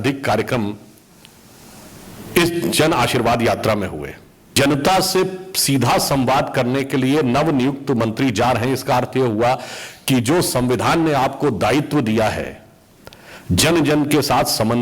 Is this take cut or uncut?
cut